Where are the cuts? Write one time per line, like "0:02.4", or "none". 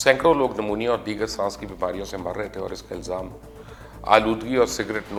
none